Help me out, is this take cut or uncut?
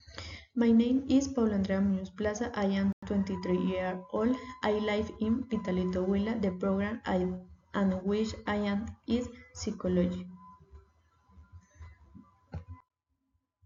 uncut